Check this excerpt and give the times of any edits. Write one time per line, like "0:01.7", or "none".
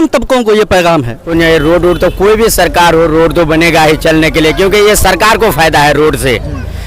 0:01.2